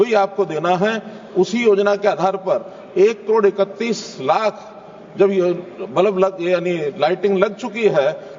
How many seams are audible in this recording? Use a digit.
0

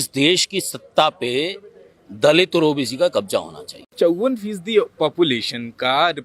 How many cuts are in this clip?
1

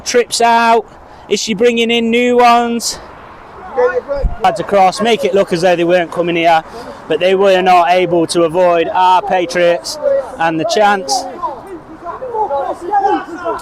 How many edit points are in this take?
1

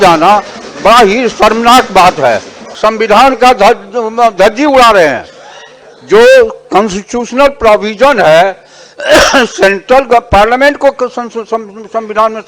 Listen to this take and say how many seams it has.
1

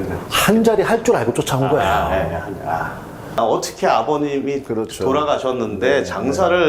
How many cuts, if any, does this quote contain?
1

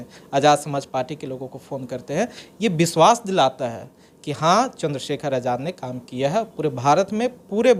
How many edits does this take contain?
0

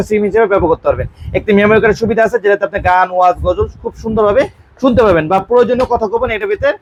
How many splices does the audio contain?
0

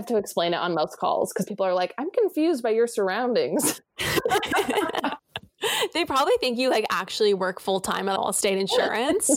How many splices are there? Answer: 1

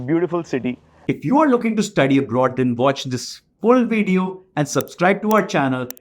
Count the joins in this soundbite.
1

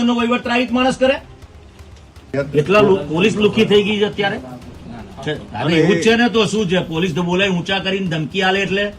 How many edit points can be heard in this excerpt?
0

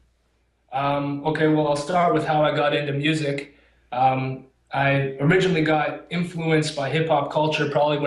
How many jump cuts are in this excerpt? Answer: 1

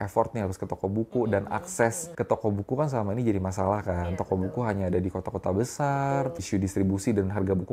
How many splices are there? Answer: 2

